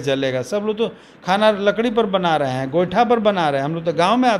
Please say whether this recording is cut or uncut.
uncut